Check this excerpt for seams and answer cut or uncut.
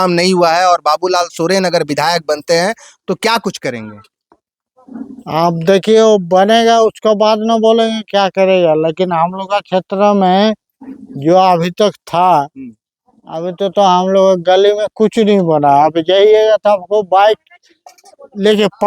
uncut